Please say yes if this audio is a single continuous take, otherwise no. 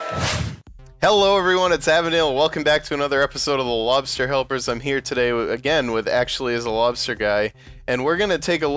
yes